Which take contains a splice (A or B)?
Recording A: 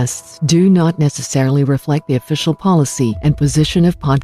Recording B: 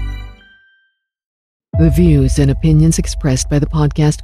B